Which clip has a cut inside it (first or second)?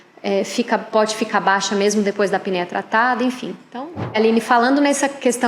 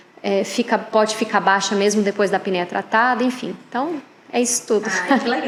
first